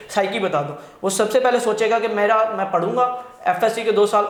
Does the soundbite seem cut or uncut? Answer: uncut